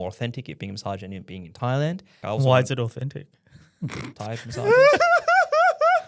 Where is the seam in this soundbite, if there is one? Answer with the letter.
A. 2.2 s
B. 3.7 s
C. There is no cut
A